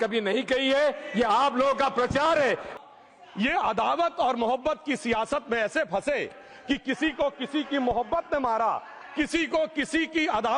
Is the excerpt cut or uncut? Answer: cut